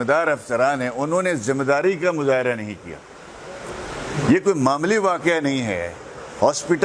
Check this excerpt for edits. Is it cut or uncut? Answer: uncut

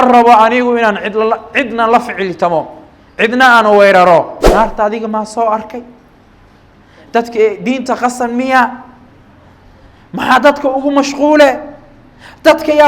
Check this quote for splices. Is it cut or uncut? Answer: cut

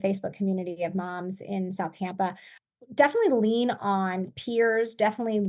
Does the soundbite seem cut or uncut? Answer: cut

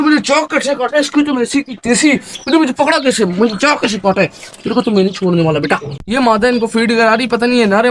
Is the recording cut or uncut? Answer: cut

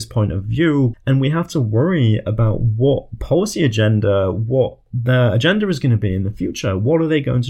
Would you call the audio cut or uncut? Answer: cut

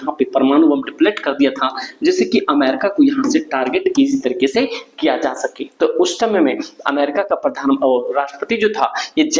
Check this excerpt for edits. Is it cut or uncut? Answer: uncut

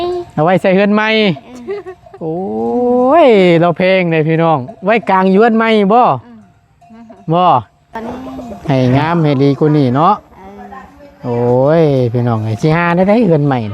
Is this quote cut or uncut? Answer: cut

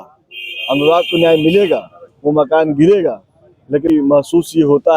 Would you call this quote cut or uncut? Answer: cut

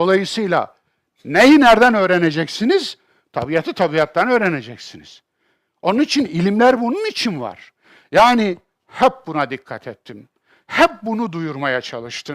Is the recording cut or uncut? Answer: cut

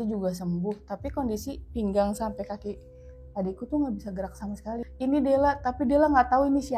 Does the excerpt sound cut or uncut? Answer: cut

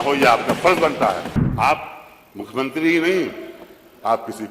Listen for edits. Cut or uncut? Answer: cut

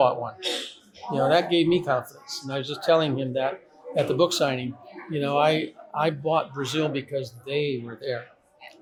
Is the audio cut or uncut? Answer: uncut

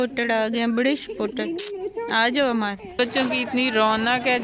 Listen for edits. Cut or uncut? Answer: cut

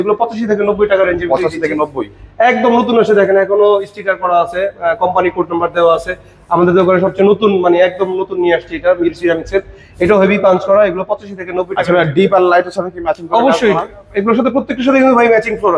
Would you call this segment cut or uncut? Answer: uncut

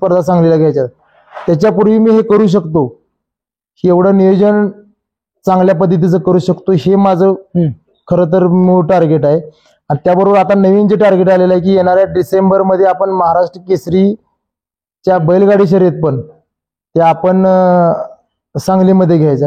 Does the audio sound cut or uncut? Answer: uncut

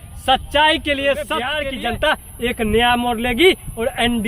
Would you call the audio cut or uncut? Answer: cut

